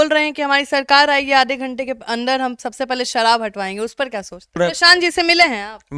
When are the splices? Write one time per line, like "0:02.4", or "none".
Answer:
0:04.6